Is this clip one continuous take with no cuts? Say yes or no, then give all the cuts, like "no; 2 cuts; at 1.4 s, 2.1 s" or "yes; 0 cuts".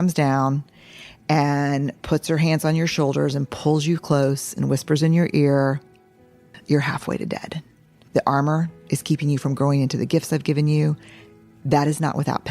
no; 2 cuts; at 6.5 s, 8.0 s